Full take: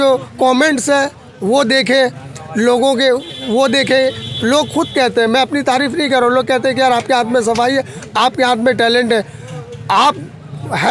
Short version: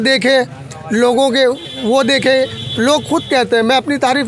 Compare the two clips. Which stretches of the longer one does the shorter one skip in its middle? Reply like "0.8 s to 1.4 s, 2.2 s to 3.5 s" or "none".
none